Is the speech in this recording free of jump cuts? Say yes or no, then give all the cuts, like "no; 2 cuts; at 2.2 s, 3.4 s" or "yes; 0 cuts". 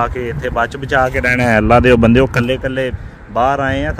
yes; 0 cuts